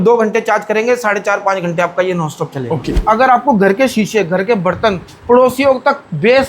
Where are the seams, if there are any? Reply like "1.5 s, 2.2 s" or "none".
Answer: 3.0 s